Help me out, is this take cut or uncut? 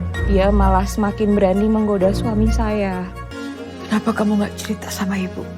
uncut